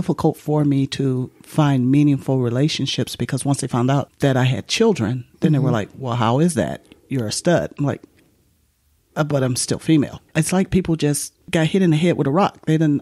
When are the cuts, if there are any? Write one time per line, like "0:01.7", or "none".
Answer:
0:04.1
0:10.2
0:11.3